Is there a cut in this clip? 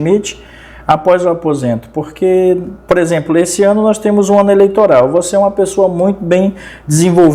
no; 0 cuts

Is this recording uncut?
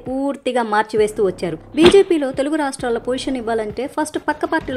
no; 1 cut; at 1.6 s

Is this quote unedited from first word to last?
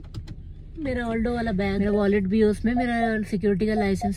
yes; 0 cuts

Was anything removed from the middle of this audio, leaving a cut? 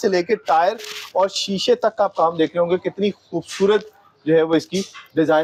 no; 0 cuts

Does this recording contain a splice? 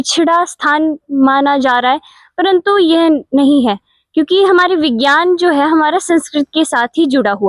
no; 0 cuts

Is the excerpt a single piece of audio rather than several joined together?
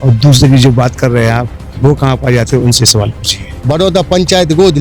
no; 1 cut; at 3.5 s

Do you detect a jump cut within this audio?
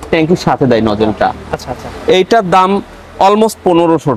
no; 0 cuts

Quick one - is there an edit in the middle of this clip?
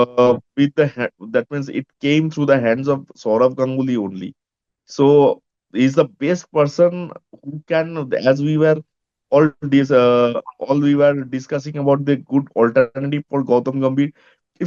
no; 0 cuts

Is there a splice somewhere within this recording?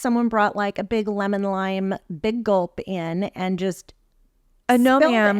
no; 0 cuts

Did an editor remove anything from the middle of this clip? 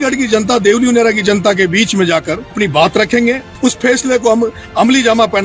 yes; 2 cuts; at 2.5 s, 3.5 s

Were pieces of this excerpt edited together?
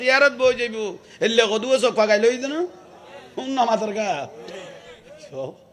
no; 0 cuts

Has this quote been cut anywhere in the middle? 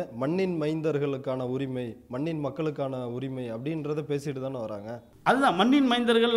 no; 0 cuts

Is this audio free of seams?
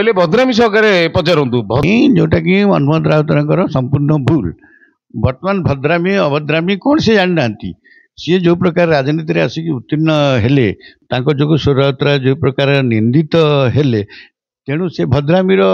no; 2 cuts; at 1.8 s, 11.0 s

